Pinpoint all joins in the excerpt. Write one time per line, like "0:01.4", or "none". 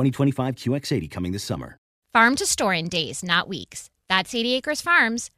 0:01.9